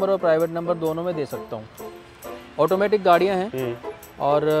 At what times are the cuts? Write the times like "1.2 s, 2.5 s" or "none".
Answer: 1.8 s